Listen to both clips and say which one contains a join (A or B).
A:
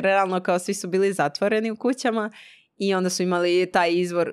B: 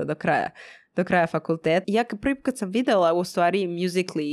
B